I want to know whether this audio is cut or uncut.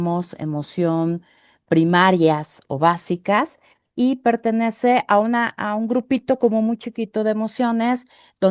uncut